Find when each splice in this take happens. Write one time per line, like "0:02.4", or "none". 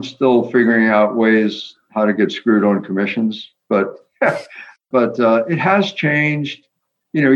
0:04.7